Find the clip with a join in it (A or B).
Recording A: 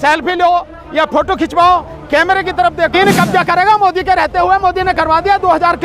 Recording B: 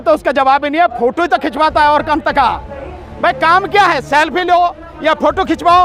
A